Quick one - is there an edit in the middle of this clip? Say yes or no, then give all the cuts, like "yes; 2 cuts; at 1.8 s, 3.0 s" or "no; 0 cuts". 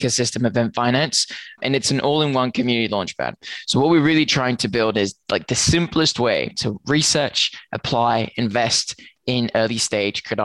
yes; 1 cut; at 1.6 s